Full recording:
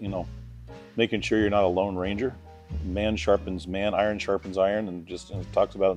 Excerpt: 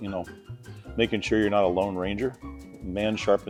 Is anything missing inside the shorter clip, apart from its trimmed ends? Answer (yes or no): no